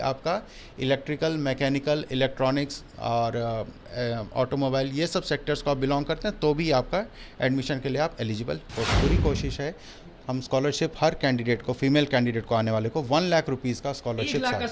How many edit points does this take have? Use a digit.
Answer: 1